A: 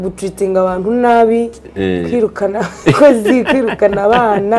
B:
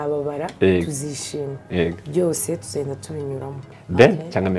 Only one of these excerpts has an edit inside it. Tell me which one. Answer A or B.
B